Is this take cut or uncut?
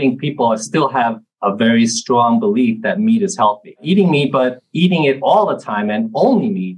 cut